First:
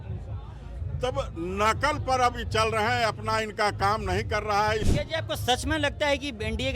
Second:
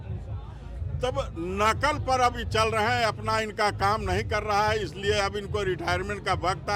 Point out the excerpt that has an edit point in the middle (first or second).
first